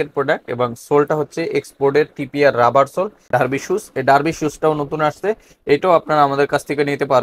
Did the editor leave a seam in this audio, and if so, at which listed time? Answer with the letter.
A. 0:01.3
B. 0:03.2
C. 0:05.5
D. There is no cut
B